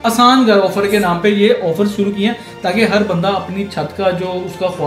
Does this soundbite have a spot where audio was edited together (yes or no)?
no